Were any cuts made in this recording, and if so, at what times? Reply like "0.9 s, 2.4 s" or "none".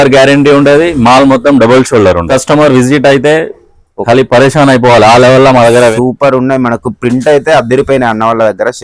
2.3 s, 5.9 s